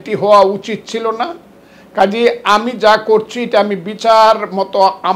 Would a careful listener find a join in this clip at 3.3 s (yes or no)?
no